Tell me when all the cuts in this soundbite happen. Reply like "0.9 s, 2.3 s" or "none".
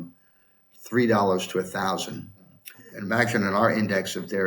2.4 s

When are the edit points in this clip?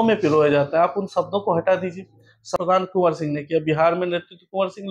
2.4 s

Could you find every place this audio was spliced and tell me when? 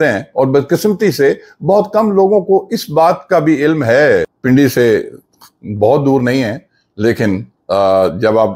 4.3 s

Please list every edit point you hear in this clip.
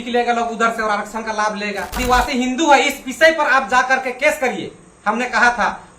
2.0 s

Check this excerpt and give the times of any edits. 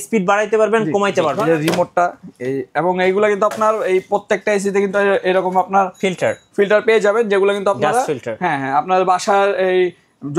1.4 s

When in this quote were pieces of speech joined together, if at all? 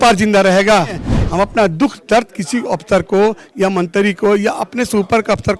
1.1 s

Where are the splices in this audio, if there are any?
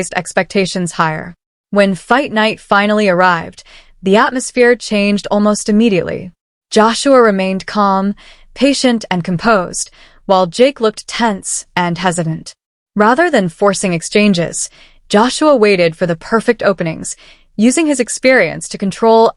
none

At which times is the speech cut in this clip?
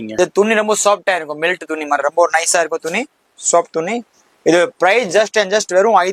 none

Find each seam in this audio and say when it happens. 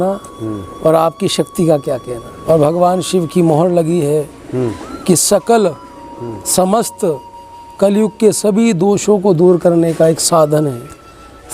2.3 s

